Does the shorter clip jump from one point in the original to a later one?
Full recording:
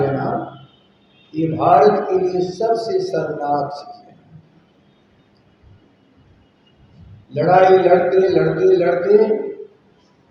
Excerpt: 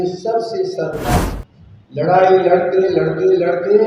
yes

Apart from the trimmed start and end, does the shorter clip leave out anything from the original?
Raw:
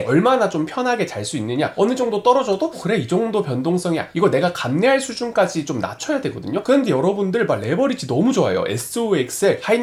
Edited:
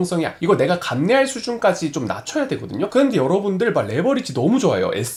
no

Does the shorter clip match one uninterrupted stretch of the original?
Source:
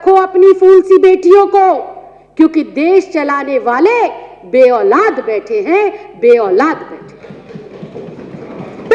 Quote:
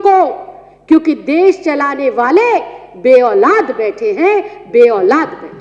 yes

